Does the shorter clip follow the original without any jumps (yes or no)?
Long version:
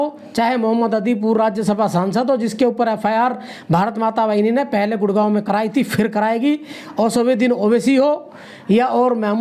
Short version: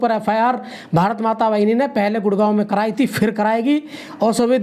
yes